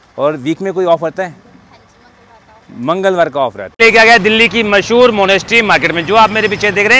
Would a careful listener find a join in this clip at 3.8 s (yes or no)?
yes